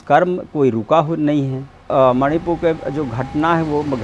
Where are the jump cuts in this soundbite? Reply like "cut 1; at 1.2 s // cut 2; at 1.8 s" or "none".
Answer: cut 1; at 1.9 s